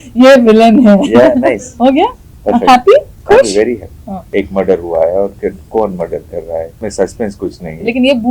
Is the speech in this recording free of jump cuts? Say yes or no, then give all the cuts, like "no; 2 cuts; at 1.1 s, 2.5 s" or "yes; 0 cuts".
no; 3 cuts; at 1.7 s, 4.3 s, 6.8 s